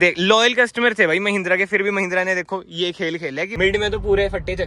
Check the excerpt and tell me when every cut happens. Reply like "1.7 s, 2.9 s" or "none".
3.5 s